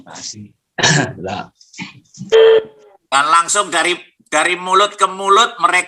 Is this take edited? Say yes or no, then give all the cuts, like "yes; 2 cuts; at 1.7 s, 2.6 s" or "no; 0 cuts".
yes; 1 cut; at 2.3 s